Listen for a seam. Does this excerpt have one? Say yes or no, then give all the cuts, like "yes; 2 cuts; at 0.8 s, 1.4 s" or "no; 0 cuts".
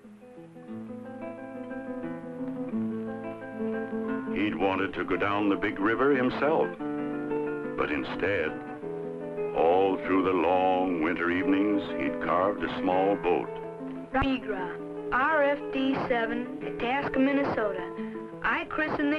no; 0 cuts